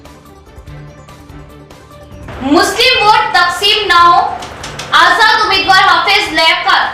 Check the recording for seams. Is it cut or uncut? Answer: cut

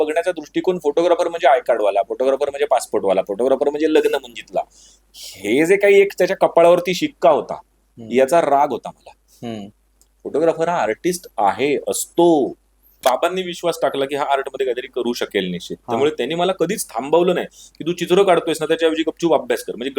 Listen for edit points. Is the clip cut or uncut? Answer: cut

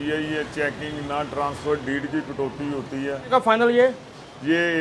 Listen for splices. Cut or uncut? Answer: cut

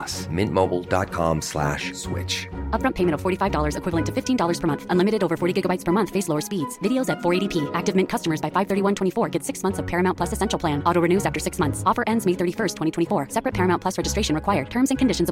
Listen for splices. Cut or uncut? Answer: uncut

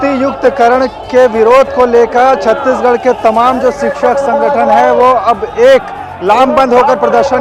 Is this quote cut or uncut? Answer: uncut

